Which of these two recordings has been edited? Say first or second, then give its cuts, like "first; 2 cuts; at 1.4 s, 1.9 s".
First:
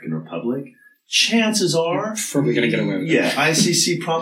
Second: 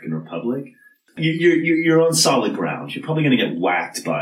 second; 1 cut; at 1.2 s